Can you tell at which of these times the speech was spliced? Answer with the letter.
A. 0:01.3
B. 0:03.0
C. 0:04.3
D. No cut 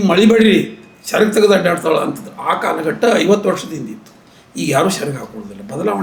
D